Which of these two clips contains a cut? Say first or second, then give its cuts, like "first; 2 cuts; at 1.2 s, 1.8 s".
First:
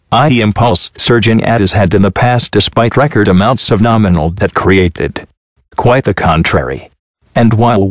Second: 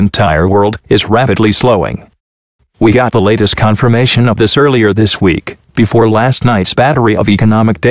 first; 1 cut; at 1.6 s